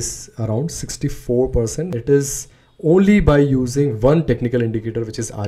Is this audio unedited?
no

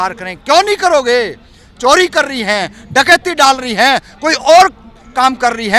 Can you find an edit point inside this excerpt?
no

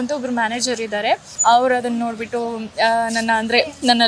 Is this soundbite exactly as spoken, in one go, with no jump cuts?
no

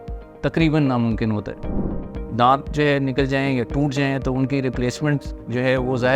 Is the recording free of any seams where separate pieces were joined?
no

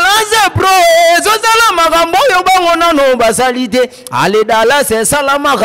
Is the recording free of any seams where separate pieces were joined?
yes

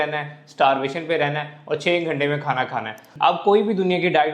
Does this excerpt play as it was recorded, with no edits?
no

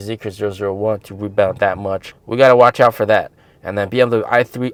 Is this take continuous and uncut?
yes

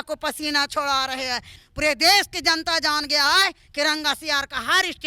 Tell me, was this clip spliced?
yes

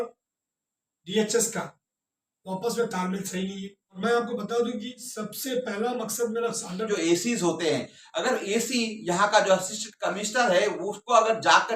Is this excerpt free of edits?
no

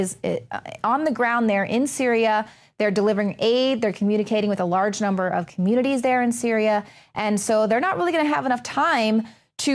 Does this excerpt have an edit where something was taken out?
yes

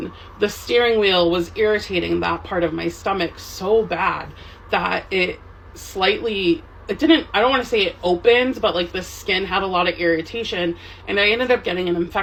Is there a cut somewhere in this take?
no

